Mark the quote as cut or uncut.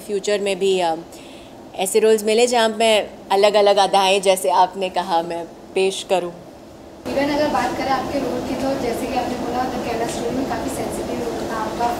uncut